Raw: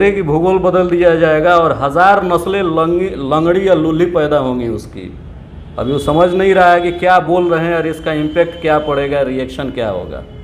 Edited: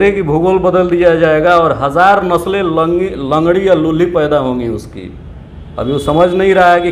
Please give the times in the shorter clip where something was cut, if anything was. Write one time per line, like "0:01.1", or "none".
none